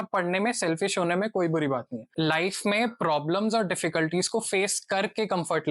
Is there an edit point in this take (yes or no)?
yes